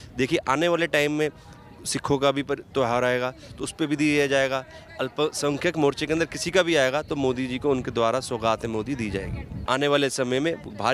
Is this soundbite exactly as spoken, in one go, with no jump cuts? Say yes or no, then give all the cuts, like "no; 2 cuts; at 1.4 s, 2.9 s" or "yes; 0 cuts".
no; 1 cut; at 9.6 s